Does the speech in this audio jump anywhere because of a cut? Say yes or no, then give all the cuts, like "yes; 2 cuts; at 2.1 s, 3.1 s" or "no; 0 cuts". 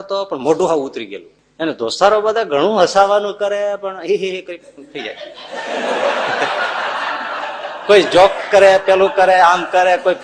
no; 0 cuts